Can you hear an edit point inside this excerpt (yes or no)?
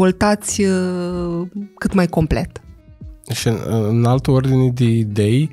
no